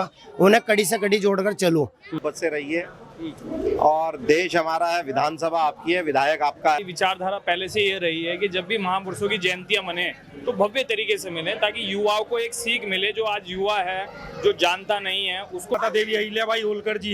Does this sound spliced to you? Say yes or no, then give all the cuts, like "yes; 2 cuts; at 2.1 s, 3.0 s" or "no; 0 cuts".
yes; 3 cuts; at 2.3 s, 6.8 s, 15.8 s